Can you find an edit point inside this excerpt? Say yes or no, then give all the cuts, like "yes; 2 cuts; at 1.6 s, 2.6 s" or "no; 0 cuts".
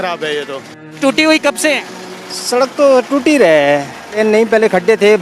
yes; 2 cuts; at 0.9 s, 4.0 s